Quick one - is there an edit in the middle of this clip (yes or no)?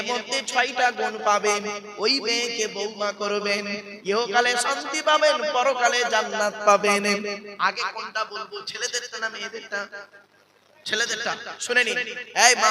no